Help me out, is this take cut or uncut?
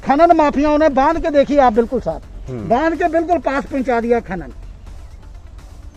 uncut